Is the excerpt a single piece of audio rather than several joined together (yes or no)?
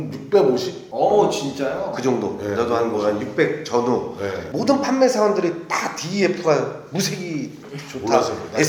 yes